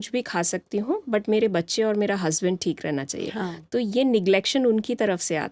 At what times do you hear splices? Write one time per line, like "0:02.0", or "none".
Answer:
none